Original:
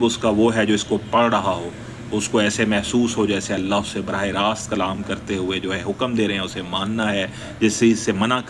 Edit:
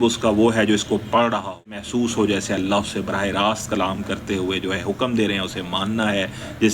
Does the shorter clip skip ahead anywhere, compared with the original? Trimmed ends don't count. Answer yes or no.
yes